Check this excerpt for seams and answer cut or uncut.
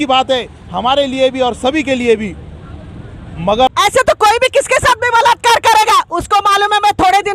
cut